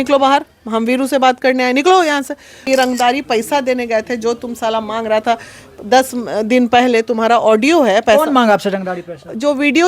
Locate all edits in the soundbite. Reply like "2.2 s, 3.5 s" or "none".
2.6 s